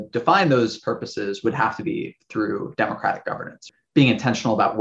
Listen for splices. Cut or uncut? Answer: cut